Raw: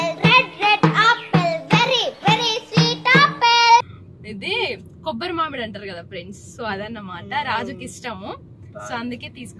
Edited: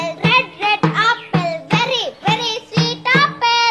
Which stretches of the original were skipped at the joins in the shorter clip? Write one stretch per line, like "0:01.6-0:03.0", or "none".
none